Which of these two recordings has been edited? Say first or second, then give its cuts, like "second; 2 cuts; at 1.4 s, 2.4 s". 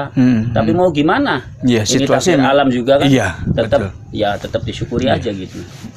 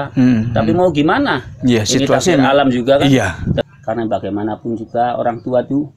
second; 1 cut; at 3.6 s